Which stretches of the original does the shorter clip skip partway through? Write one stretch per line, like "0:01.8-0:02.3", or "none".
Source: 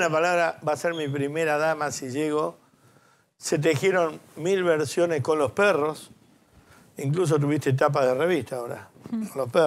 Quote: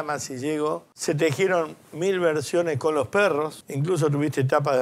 0:02.6-0:03.3
0:06.1-0:06.9